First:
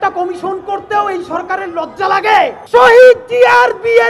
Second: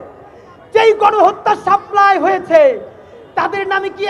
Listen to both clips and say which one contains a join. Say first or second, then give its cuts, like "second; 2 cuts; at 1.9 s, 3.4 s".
first; 1 cut; at 2.6 s